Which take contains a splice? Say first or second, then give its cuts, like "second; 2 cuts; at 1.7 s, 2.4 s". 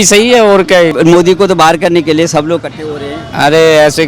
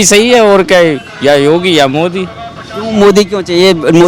first; 1 cut; at 0.9 s